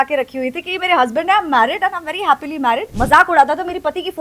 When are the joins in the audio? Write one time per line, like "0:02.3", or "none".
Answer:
0:02.9